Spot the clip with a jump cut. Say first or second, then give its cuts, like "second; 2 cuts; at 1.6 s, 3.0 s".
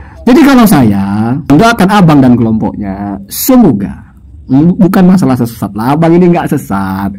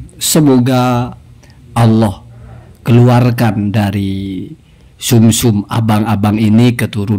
first; 1 cut; at 1.5 s